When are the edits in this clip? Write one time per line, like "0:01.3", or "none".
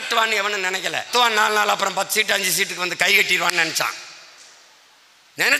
0:01.1